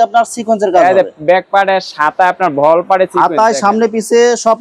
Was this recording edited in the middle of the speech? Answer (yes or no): no